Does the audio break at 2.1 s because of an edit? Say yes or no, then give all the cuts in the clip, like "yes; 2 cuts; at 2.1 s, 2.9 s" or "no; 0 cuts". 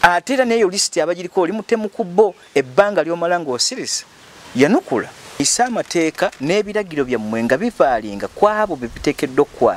no; 1 cut; at 5.4 s